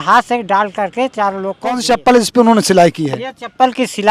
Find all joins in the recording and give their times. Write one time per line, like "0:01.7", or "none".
0:01.8